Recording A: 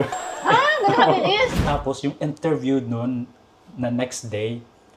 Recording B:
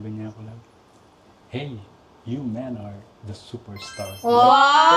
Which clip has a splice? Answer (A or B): A